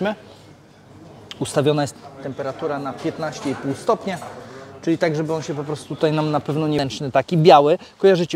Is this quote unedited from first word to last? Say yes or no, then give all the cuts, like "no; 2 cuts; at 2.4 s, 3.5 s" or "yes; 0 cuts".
no; 1 cut; at 6.8 s